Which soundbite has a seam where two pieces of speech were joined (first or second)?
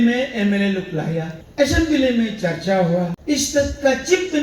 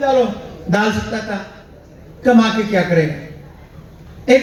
first